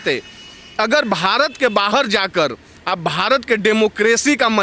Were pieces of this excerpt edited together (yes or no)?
no